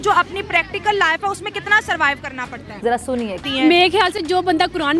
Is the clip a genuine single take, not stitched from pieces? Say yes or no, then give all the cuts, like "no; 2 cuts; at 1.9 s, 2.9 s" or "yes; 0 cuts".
no; 1 cut; at 3.0 s